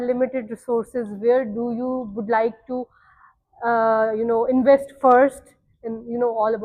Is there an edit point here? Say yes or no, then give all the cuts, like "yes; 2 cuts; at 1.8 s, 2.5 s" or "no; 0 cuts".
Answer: no; 0 cuts